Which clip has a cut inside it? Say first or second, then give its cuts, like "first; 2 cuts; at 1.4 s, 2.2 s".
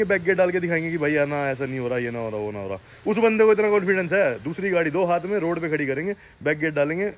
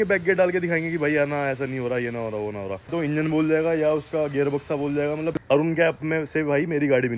second; 2 cuts; at 2.9 s, 5.3 s